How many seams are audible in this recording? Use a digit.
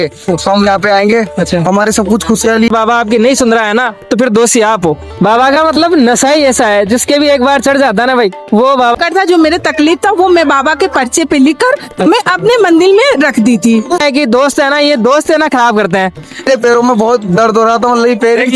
5